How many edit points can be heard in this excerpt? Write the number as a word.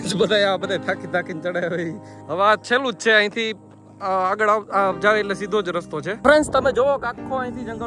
two